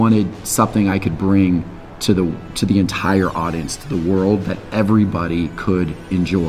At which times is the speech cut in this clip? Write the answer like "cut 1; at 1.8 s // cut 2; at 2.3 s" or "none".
none